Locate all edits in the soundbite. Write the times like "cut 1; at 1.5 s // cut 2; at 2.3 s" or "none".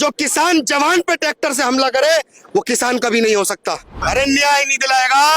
cut 1; at 4.0 s